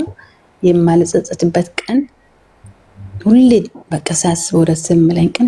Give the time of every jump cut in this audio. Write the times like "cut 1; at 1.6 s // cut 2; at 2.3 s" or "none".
none